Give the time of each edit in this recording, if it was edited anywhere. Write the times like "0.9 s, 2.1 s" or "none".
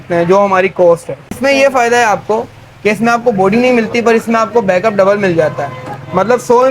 1.4 s